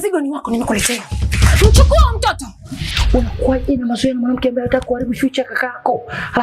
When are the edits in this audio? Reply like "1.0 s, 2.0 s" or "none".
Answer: 2.8 s